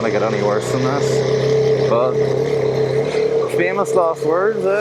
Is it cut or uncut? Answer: uncut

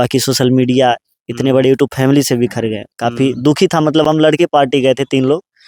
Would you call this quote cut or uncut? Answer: uncut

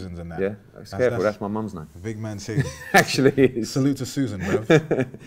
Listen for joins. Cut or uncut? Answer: uncut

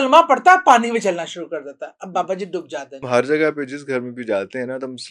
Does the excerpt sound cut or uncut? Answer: cut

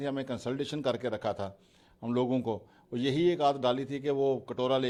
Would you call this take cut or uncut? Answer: uncut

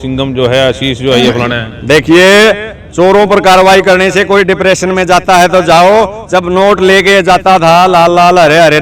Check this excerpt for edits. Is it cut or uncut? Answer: uncut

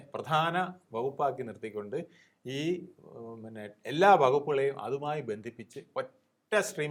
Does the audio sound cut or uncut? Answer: uncut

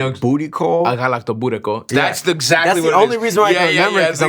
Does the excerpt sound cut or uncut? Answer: cut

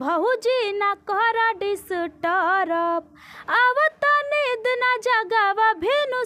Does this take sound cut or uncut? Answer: uncut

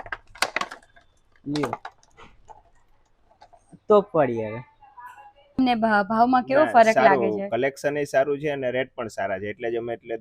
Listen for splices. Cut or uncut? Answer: cut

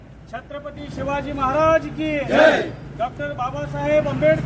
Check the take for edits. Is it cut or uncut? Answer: uncut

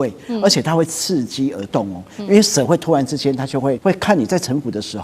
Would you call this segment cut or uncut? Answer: cut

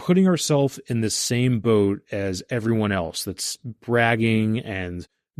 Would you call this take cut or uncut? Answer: uncut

